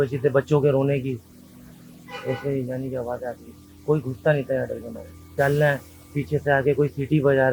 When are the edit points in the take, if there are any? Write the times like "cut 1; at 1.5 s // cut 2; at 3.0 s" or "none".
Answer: cut 1; at 5.2 s